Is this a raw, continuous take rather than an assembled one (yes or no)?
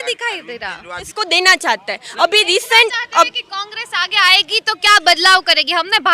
no